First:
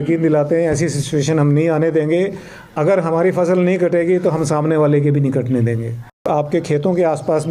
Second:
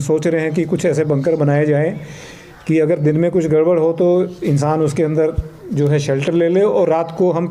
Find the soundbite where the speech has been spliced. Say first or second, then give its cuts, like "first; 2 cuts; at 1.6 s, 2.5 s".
first; 1 cut; at 6.3 s